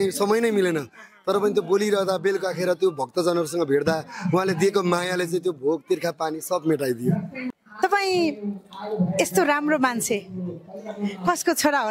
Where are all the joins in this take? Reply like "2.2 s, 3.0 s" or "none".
none